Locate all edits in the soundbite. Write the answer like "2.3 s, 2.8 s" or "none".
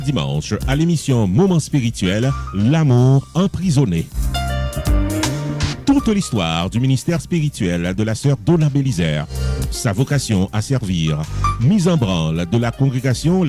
none